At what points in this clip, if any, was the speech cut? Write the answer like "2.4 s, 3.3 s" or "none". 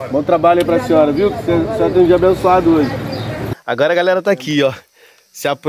3.3 s